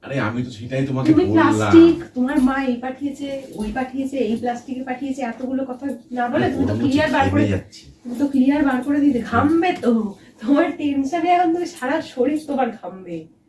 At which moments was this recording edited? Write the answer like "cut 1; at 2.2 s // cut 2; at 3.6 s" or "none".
none